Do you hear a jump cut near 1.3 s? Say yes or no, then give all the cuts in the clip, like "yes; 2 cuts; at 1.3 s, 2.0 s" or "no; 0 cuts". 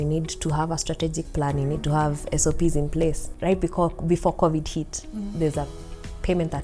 no; 1 cut; at 3.3 s